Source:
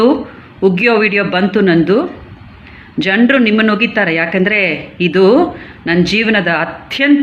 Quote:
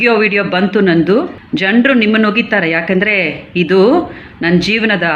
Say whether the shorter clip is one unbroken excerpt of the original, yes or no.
no